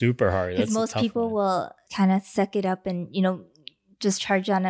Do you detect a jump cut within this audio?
yes; 1 cut; at 1.8 s

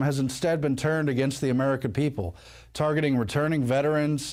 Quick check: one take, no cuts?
yes; 0 cuts

